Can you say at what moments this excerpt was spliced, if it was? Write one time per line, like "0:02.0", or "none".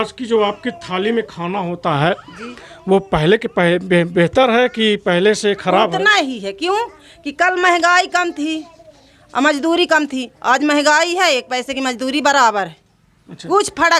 none